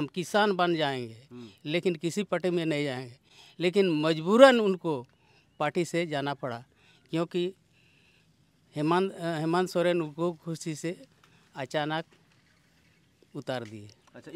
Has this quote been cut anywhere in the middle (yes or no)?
no